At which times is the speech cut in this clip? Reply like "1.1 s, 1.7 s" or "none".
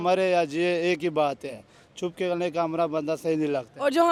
none